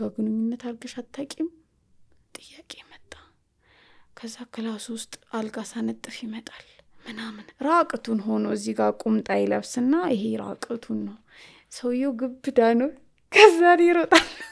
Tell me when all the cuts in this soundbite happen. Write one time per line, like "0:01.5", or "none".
none